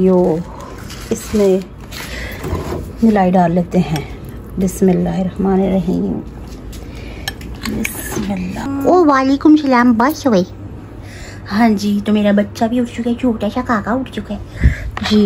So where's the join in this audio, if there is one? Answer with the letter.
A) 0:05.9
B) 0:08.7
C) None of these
B